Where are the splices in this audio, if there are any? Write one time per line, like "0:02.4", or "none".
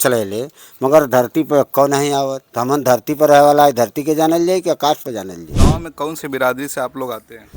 0:02.5
0:05.5